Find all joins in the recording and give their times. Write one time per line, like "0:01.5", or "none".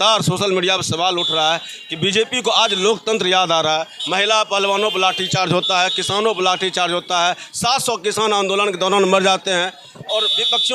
none